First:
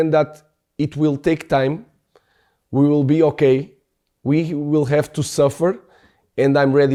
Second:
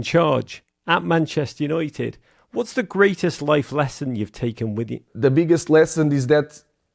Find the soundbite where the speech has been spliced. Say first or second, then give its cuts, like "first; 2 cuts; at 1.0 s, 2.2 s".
second; 1 cut; at 5.0 s